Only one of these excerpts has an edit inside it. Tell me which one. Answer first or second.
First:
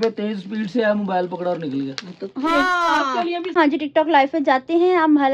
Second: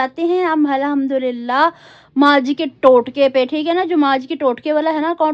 first